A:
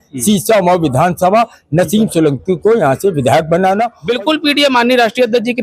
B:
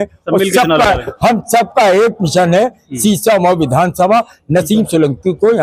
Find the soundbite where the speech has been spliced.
A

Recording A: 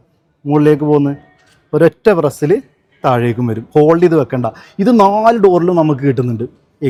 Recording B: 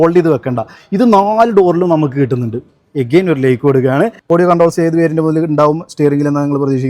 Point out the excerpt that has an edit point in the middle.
B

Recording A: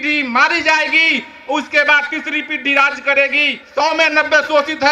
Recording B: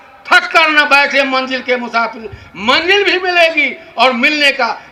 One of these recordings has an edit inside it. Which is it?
A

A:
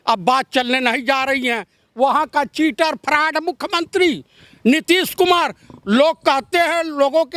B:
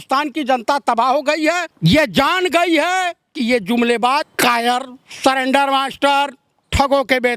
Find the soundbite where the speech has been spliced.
B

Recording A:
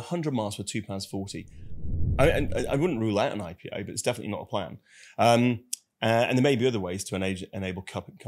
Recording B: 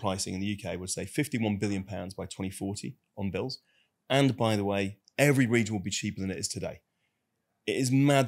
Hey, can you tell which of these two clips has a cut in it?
A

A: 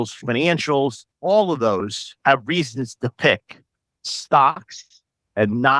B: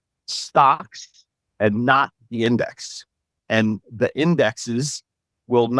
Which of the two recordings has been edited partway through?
A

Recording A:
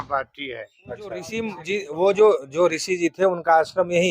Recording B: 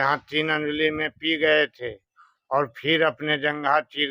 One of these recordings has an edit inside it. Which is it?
A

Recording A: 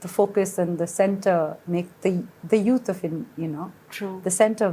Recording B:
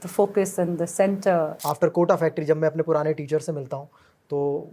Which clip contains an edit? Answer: B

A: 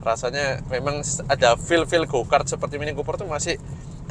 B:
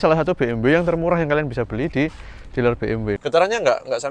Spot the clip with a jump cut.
B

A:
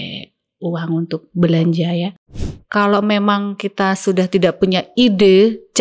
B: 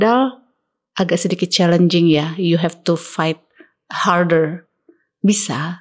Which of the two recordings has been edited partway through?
A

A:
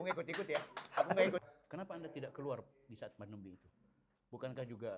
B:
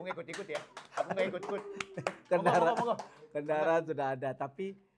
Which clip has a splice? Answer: A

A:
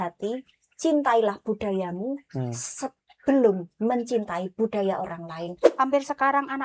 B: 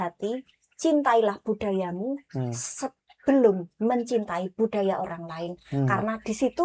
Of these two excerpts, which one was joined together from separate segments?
A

